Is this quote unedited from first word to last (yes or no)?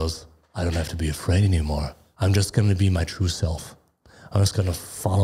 no